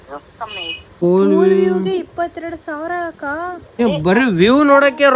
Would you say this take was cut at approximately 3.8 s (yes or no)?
yes